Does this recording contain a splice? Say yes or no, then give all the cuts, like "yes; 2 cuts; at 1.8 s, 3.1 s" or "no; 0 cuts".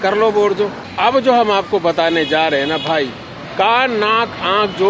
yes; 1 cut; at 0.9 s